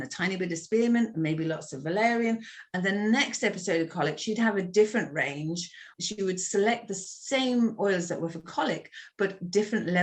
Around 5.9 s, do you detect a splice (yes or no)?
yes